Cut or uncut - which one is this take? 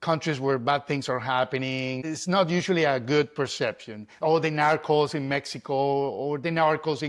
cut